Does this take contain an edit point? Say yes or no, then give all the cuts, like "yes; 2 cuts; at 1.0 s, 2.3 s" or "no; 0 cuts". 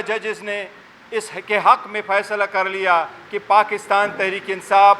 no; 0 cuts